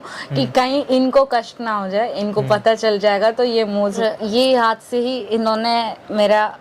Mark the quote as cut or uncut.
cut